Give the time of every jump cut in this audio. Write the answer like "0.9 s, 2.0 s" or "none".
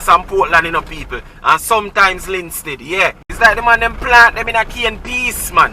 3.2 s